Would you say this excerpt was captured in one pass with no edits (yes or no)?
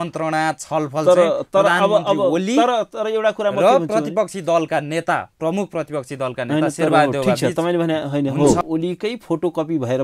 no